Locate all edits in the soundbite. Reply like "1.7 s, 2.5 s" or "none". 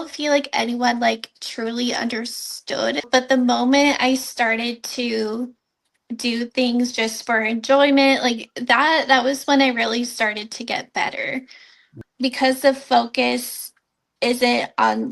3.0 s, 6.0 s, 12.0 s

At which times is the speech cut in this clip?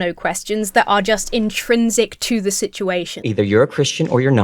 3.2 s

